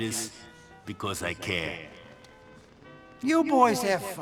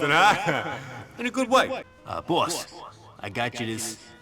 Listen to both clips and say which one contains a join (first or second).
second